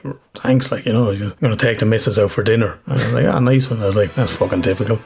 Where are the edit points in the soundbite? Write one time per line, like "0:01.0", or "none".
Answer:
0:01.3
0:02.8